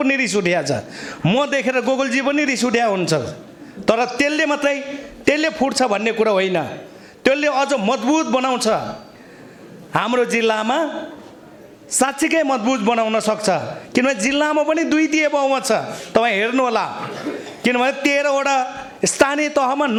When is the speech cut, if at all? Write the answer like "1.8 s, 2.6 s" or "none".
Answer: none